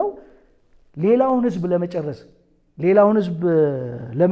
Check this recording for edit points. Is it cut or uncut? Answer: uncut